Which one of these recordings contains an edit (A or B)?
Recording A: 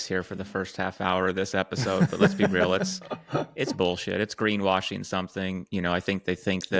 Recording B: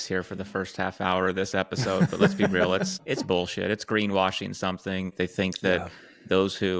B